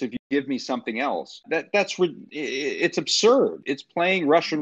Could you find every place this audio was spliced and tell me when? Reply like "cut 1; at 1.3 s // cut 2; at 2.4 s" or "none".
cut 1; at 1.4 s // cut 2; at 3.6 s